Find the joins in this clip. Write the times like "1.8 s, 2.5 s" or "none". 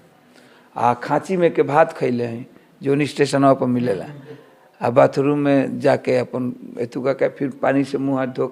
none